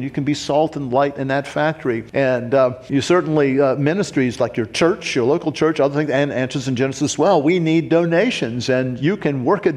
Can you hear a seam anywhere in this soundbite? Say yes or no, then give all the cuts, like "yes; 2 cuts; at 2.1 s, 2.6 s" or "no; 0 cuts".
no; 0 cuts